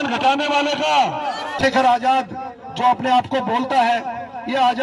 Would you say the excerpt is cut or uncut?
cut